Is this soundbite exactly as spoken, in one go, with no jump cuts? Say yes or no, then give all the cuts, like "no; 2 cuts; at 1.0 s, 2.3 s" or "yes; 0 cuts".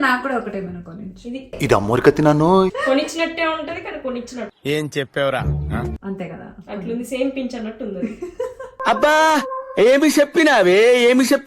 no; 2 cuts; at 2.8 s, 6.0 s